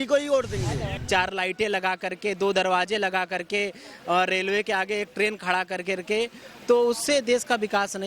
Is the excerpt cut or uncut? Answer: cut